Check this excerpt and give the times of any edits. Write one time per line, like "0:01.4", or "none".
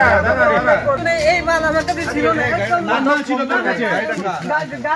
0:01.0